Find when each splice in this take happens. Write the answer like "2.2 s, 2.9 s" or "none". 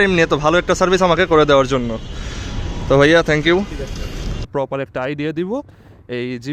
4.4 s